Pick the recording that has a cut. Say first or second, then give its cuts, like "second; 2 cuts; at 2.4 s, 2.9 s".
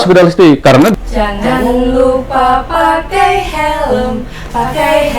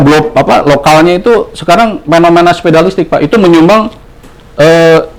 first; 1 cut; at 0.9 s